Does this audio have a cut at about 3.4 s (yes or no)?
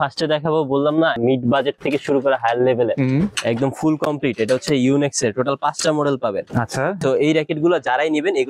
yes